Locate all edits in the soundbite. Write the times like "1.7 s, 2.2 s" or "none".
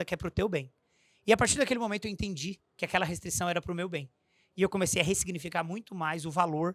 none